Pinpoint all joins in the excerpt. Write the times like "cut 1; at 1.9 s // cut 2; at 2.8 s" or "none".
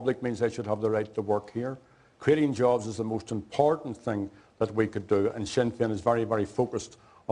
cut 1; at 5.9 s